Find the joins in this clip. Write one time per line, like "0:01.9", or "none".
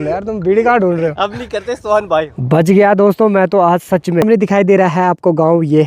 0:02.4
0:04.2